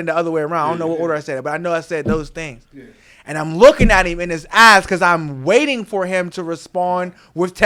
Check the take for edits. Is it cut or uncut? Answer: uncut